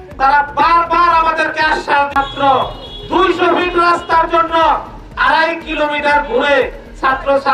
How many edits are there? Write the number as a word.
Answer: one